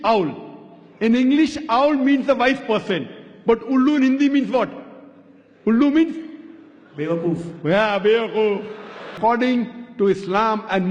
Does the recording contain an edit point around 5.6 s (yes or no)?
no